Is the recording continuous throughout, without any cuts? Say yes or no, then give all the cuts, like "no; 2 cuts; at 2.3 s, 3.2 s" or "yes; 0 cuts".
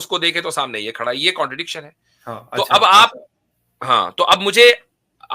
yes; 0 cuts